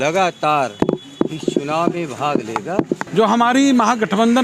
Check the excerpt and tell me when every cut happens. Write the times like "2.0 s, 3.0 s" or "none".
3.0 s